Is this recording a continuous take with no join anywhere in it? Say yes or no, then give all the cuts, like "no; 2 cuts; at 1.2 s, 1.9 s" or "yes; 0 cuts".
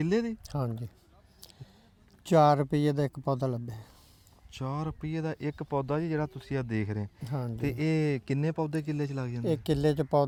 yes; 0 cuts